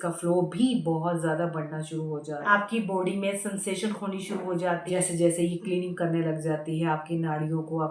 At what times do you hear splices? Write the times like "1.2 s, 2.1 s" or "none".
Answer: 2.5 s, 4.9 s